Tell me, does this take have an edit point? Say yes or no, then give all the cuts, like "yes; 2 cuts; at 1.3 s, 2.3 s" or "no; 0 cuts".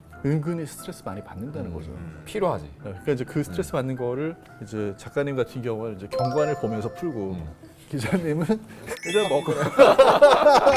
no; 0 cuts